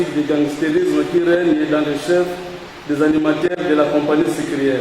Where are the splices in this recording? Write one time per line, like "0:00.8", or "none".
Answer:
none